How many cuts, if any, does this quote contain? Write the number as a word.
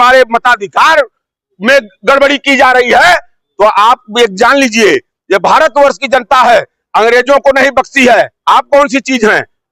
zero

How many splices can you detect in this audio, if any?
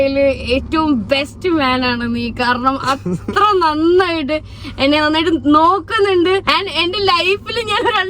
one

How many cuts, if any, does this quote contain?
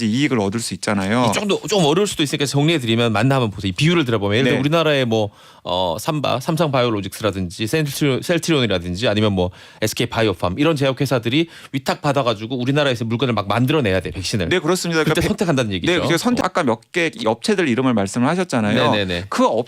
one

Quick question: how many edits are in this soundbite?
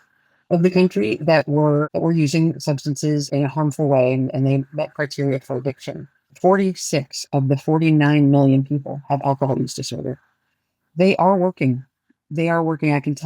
two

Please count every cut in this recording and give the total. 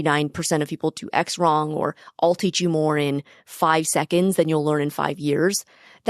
zero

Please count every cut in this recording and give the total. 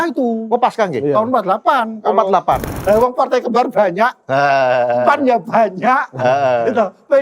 one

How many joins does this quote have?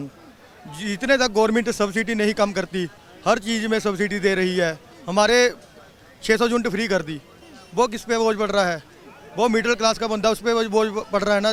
zero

